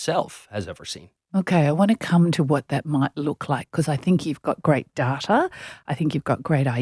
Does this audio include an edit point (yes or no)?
no